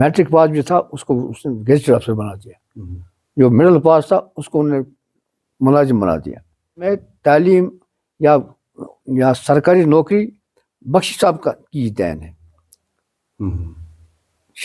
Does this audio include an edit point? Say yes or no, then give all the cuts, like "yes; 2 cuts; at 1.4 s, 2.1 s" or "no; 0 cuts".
yes; 1 cut; at 6.9 s